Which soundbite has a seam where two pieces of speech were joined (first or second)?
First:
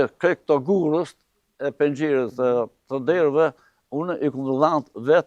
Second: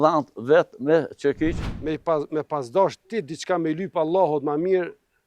second